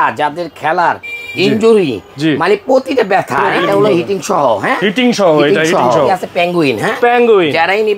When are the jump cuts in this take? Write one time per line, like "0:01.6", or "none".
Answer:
0:03.5
0:06.2